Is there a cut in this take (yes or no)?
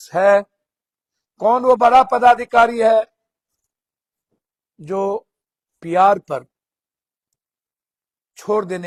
no